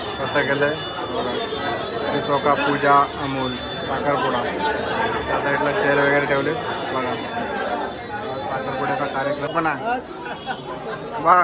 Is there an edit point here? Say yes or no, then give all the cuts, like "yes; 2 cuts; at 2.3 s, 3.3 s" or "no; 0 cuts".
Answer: yes; 1 cut; at 9.5 s